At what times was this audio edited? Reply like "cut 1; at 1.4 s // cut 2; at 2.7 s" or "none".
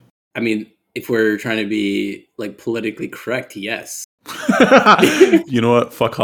cut 1; at 5.3 s